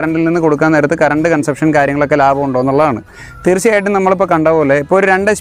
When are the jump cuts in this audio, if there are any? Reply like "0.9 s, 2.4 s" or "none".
none